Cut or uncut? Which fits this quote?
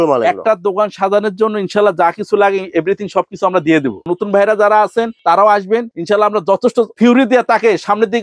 uncut